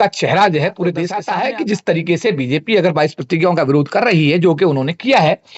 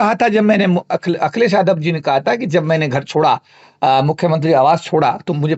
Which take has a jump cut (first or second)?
first